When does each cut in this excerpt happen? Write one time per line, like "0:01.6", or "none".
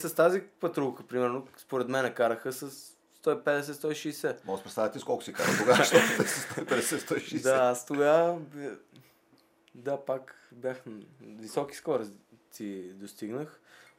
none